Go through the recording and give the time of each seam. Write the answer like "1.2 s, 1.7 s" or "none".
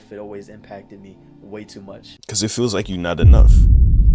2.1 s

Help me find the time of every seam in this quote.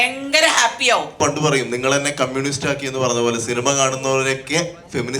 1.1 s

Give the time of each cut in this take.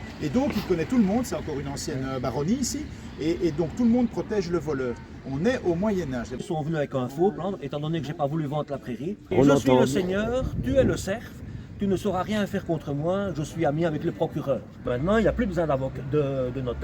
6.4 s, 9.3 s, 14.9 s

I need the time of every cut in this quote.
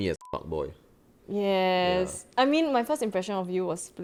none

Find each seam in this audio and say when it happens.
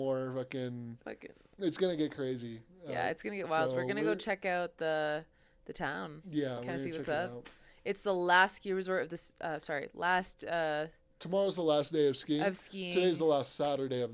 none

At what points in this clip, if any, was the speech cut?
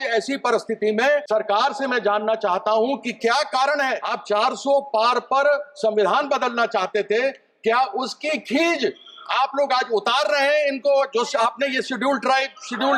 1.2 s, 4.1 s

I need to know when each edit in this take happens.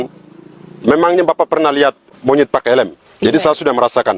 2.1 s, 3.0 s

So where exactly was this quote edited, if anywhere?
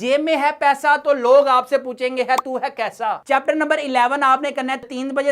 3.2 s

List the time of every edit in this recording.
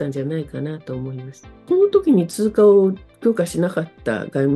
1.6 s

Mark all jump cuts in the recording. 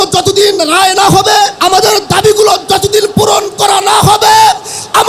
1.6 s

